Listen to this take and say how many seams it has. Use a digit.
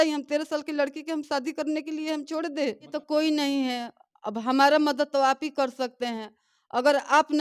1